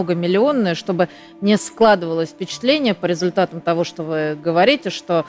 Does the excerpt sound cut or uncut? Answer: uncut